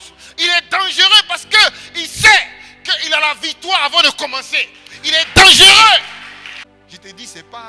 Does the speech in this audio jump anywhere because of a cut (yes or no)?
yes